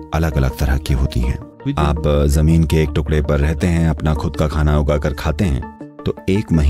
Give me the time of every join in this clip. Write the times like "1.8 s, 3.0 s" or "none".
1.5 s